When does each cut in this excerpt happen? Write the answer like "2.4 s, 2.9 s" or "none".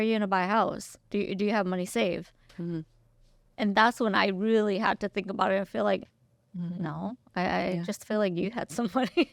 none